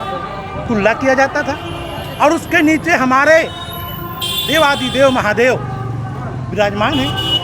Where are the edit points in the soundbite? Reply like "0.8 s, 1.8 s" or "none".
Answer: none

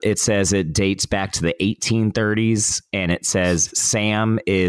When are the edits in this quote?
none

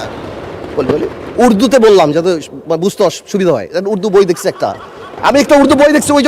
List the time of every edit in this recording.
none

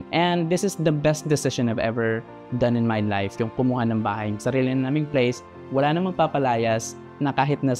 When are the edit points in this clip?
none

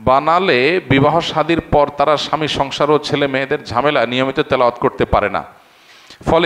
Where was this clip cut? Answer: none

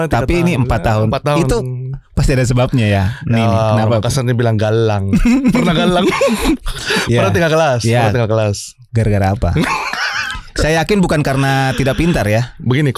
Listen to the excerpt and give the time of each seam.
none

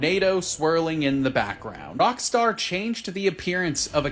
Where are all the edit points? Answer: 1.9 s

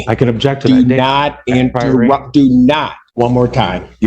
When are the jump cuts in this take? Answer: 3.0 s

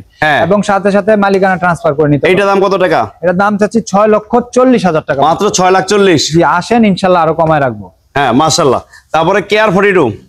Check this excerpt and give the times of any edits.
none

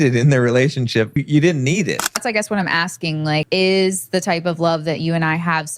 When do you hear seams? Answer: 1.2 s, 2.2 s, 3.5 s

